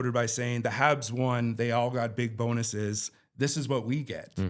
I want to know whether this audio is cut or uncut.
uncut